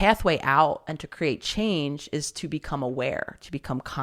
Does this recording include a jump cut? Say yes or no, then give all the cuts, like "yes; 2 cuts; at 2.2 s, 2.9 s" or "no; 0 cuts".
no; 0 cuts